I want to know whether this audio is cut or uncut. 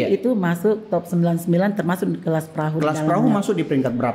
uncut